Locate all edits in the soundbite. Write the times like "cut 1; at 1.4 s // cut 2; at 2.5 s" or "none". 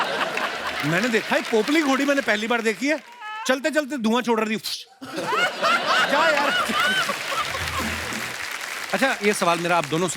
cut 1; at 8.1 s